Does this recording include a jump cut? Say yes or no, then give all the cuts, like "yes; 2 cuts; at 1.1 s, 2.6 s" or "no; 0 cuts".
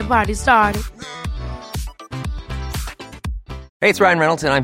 no; 0 cuts